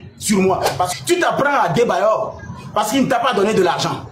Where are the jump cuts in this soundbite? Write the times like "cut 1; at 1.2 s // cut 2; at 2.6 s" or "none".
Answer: cut 1; at 0.9 s